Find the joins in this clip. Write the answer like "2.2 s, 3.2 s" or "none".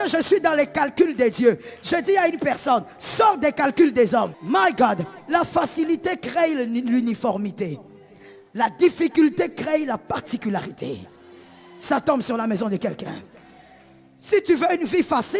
4.4 s